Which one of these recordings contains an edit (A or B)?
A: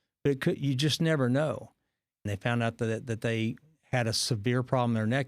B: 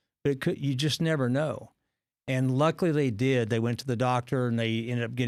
A